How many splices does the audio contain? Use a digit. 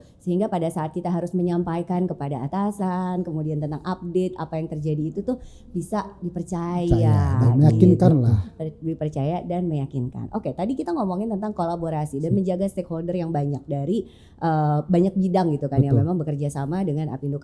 0